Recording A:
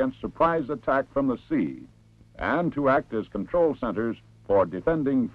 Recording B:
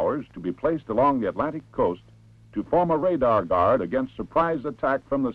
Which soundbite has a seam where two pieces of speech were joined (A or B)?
A